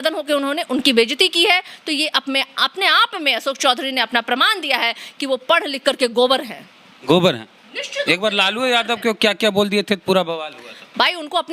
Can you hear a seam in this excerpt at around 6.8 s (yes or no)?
no